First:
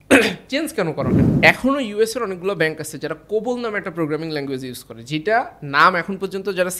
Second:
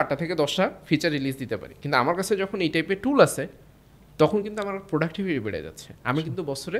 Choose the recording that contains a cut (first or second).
first